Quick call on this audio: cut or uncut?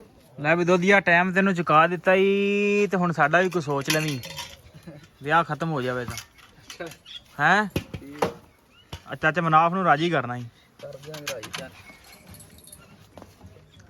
uncut